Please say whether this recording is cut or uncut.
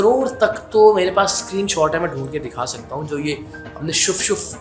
uncut